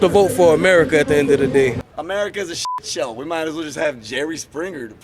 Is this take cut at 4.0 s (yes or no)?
no